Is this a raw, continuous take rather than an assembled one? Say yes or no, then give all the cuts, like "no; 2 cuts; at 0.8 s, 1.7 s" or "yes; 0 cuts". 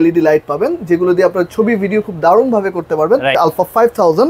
no; 1 cut; at 3.4 s